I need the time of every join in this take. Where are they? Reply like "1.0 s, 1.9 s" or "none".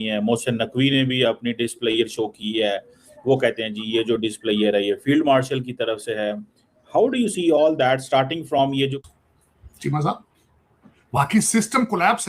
9.0 s

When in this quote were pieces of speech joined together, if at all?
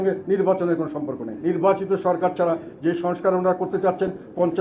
1.3 s

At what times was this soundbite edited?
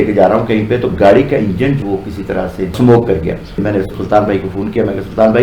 3.5 s

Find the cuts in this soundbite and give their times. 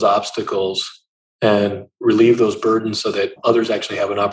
3.4 s

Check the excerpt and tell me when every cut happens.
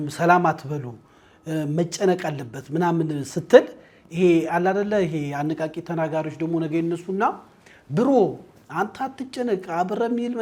none

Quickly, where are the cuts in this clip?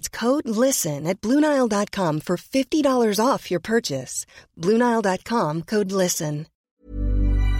6.6 s

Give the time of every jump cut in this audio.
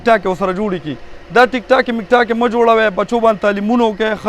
none

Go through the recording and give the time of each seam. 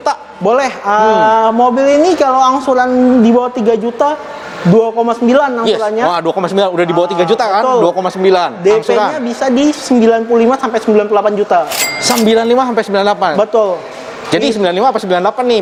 none

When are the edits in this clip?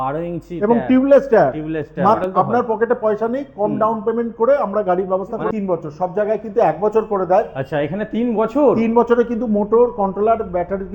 2.2 s, 5.5 s

